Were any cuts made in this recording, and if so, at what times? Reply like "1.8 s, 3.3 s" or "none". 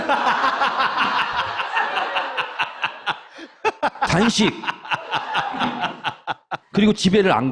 2.7 s